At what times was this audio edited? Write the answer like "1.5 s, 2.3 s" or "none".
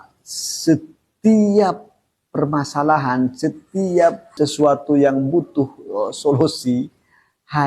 4.3 s